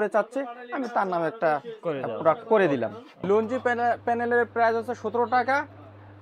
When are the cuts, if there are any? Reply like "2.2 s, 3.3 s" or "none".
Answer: 3.2 s